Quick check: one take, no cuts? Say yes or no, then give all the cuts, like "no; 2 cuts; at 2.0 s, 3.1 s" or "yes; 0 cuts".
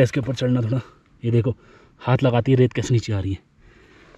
yes; 0 cuts